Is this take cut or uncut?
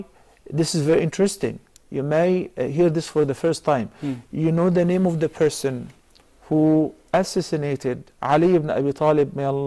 uncut